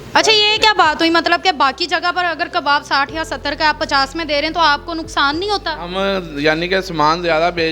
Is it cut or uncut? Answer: uncut